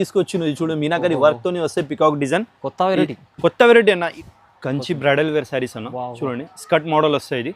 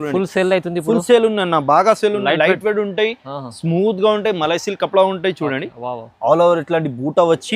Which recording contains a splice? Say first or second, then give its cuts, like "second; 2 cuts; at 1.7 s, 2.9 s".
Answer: first; 1 cut; at 4.1 s